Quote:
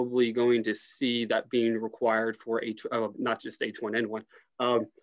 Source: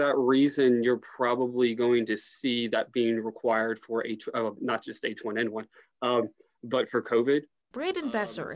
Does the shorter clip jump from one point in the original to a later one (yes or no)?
no